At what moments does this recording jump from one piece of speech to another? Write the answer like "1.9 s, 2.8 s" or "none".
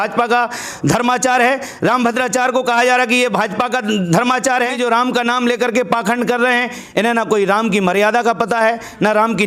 4.7 s